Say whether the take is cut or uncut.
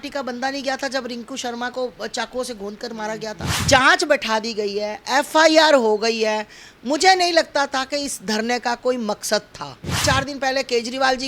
cut